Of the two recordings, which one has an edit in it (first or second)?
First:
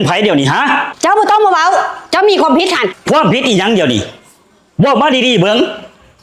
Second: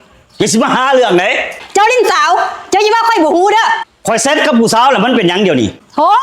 second